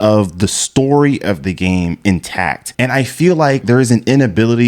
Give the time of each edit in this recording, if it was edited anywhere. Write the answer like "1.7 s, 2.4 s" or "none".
2.6 s, 3.6 s